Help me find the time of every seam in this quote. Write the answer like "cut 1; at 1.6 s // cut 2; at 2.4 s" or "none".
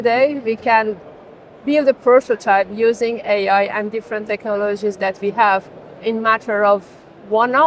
none

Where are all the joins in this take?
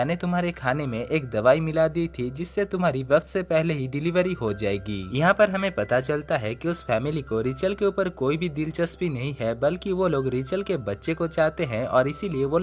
none

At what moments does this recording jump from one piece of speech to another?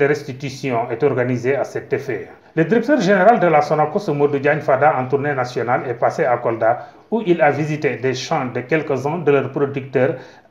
cut 1; at 2.2 s

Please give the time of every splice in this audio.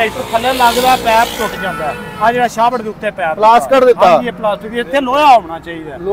none

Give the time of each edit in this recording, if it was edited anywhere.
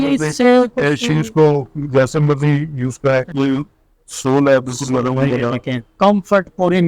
cut 1; at 3.3 s

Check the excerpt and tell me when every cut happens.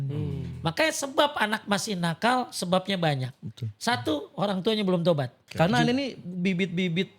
cut 1; at 5.4 s

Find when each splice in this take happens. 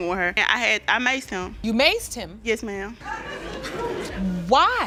none

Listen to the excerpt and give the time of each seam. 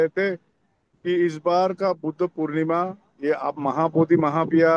none

